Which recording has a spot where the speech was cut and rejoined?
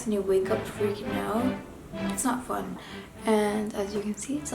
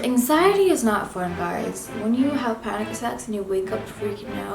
first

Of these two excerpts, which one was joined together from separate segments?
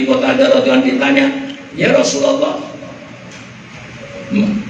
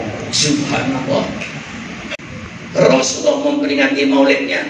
second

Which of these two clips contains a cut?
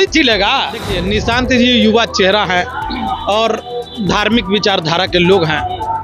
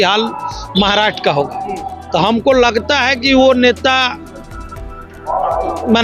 first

